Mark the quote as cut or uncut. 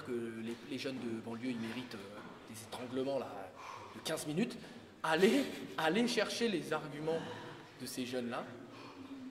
uncut